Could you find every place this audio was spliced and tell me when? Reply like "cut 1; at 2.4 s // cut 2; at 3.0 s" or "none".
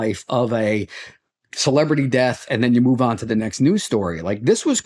none